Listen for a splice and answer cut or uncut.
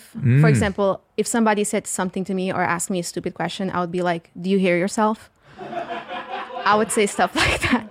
uncut